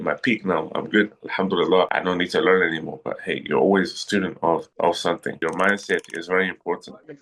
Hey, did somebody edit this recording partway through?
yes; 2 cuts; at 1.9 s, 5.4 s

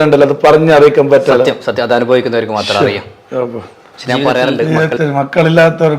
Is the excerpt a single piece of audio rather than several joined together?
no; 1 cut; at 4.7 s

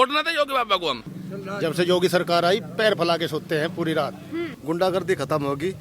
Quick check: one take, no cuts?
no; 2 cuts; at 1.1 s, 4.5 s

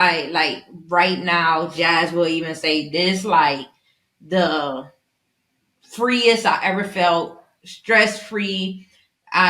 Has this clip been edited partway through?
no; 0 cuts

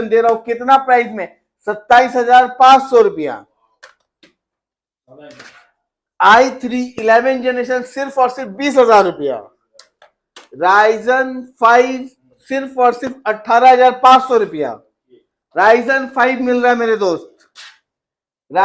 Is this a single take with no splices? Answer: yes; 0 cuts

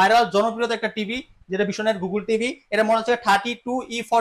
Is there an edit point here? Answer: no; 0 cuts

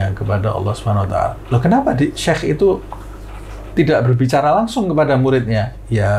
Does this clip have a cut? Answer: no; 0 cuts

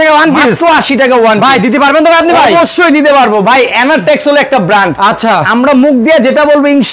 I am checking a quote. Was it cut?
no; 0 cuts

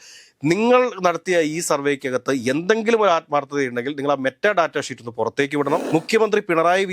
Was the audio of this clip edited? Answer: yes; 1 cut; at 5.8 s

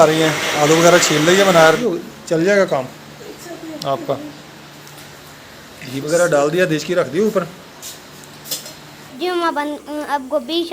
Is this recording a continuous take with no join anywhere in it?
no; 2 cuts; at 1.8 s, 9.1 s

